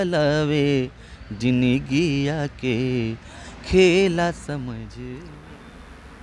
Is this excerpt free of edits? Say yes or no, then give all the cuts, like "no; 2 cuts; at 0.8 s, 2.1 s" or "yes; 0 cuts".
no; 1 cut; at 5.0 s